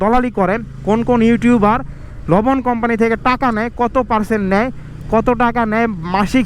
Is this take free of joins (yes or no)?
yes